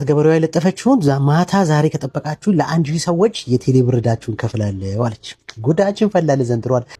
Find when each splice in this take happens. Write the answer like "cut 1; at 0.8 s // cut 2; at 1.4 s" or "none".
none